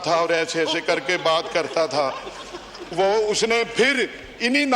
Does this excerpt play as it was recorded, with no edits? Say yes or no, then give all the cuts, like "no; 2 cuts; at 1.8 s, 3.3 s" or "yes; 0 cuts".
yes; 0 cuts